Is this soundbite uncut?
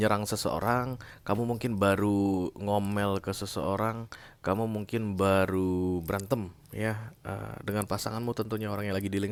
yes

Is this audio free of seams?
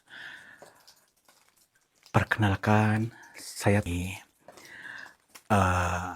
no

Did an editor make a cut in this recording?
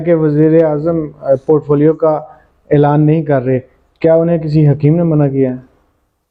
no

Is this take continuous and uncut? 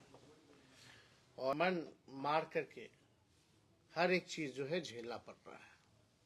no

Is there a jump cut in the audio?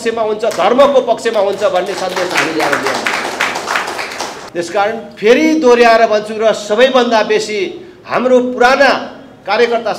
yes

